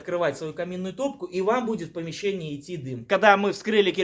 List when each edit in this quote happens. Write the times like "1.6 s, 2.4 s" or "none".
3.1 s